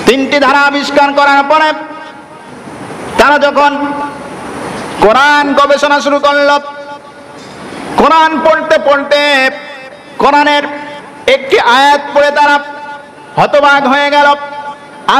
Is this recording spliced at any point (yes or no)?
no